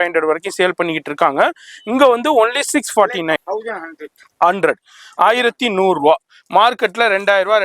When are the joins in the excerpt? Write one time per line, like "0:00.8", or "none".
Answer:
0:03.5